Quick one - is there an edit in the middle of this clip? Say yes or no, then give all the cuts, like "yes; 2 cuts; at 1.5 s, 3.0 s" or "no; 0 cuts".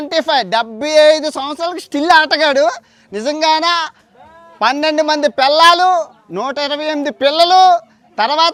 no; 0 cuts